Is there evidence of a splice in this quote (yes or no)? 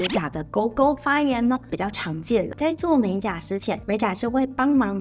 yes